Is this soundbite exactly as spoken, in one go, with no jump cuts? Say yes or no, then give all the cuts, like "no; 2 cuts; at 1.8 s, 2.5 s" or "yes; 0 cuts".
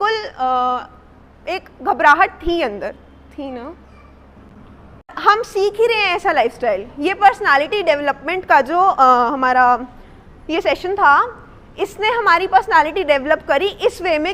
no; 1 cut; at 5.1 s